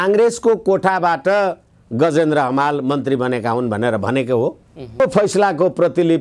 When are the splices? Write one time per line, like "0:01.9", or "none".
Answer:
0:05.0